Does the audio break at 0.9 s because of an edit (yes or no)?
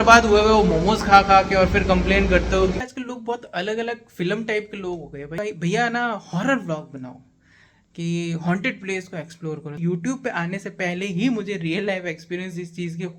no